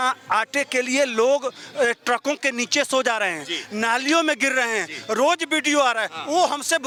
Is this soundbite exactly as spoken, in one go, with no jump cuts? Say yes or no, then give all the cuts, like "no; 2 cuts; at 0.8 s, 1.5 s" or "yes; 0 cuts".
yes; 0 cuts